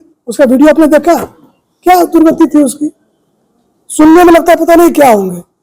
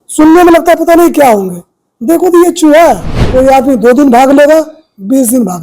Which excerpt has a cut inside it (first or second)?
second